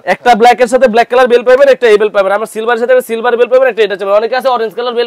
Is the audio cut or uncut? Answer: uncut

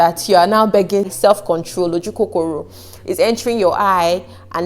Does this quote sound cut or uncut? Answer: cut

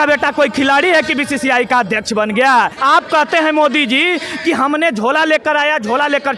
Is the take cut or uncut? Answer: cut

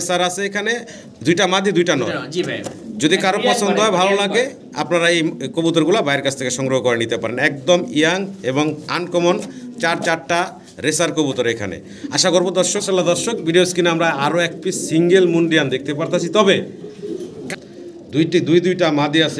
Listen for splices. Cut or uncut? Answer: cut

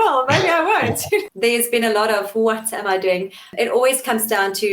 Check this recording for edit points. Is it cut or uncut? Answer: cut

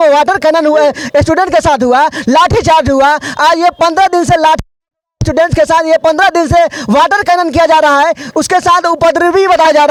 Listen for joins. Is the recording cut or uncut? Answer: uncut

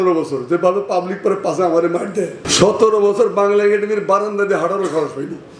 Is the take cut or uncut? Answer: cut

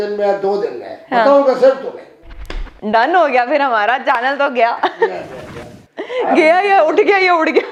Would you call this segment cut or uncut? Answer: uncut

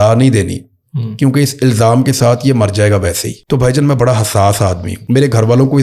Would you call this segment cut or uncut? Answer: cut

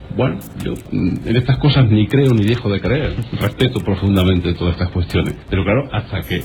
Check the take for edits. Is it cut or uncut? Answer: cut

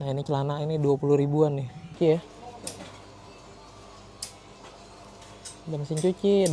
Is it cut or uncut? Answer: cut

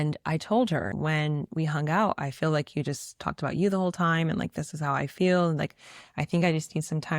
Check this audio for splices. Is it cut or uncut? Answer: cut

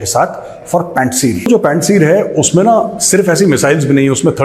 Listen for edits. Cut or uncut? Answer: cut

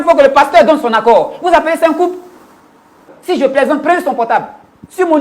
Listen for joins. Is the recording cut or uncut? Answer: cut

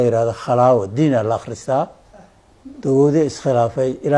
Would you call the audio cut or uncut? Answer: uncut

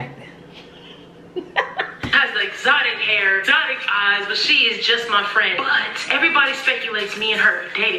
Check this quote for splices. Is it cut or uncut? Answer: uncut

